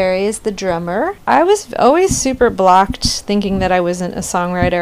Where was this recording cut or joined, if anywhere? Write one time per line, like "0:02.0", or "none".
0:01.2